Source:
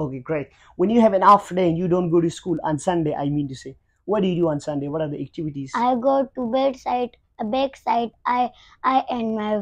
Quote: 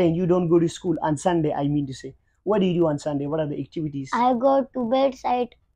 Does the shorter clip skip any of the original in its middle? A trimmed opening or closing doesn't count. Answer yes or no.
no